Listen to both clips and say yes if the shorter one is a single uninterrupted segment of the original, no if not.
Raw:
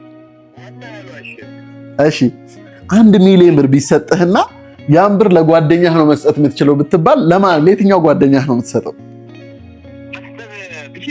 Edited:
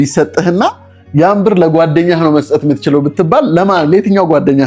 yes